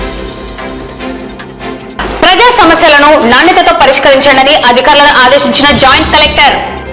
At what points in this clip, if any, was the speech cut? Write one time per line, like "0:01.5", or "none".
0:01.7